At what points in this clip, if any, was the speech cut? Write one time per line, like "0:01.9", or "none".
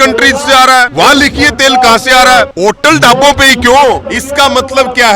0:00.9
0:02.5
0:04.1